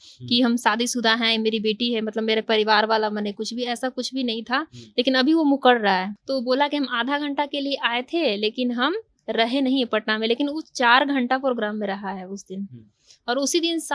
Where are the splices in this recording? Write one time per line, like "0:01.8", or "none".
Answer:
0:06.2